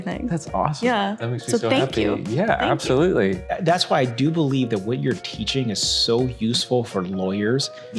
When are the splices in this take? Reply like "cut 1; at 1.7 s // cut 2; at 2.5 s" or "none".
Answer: cut 1; at 3.5 s